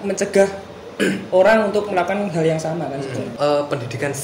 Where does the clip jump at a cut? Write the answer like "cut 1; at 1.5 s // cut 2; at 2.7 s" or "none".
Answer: cut 1; at 3.3 s

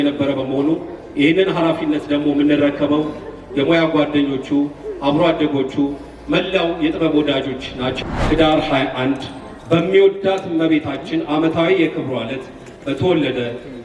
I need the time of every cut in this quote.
cut 1; at 8.0 s

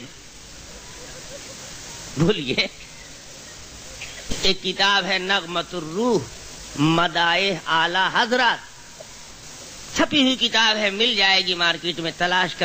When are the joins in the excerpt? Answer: cut 1; at 4.3 s

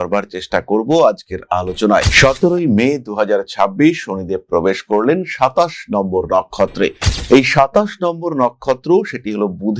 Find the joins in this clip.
cut 1; at 2.1 s

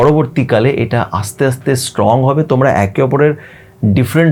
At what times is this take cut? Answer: none

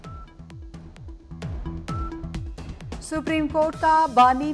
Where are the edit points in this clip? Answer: cut 1; at 1.3 s

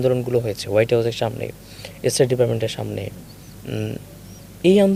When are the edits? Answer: none

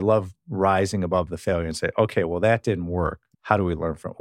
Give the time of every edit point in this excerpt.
cut 1; at 3.3 s

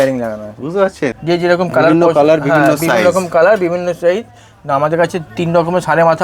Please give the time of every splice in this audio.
cut 1; at 1.2 s

